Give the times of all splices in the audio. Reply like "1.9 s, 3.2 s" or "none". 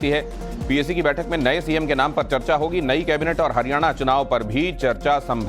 1.2 s